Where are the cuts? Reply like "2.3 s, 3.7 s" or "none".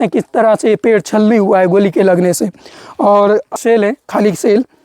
3.5 s